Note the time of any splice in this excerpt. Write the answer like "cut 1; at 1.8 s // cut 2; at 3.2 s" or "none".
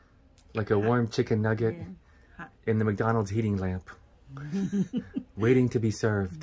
none